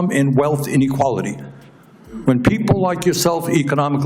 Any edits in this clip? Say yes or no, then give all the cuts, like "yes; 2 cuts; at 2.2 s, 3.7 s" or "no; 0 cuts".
no; 0 cuts